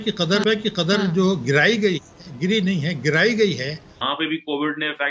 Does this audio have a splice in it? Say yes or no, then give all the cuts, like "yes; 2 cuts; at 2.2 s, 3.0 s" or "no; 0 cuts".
yes; 1 cut; at 4.0 s